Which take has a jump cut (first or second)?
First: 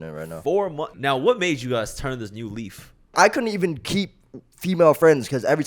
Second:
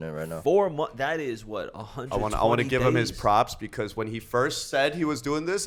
first